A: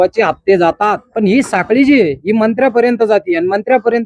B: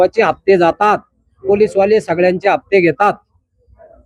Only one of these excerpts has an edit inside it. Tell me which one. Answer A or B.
A